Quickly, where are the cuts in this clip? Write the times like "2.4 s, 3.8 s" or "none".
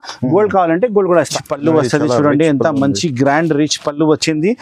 1.4 s

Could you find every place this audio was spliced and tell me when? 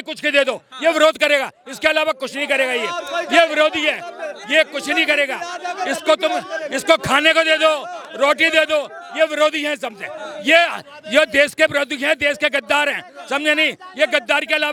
none

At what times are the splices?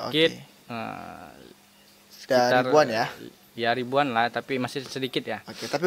none

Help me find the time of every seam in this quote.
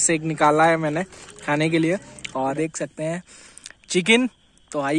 2.5 s

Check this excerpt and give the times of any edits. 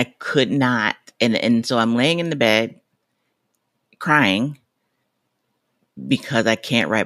none

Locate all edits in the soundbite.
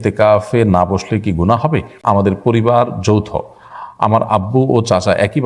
2.0 s

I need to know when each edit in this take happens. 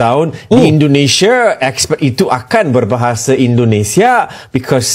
none

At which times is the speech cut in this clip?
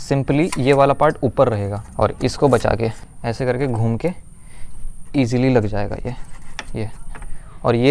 none

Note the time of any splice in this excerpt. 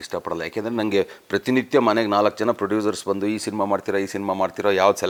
none

